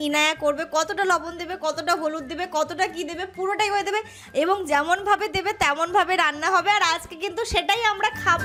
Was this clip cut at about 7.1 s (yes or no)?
no